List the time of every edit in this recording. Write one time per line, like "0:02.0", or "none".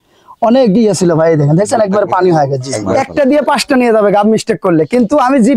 0:02.8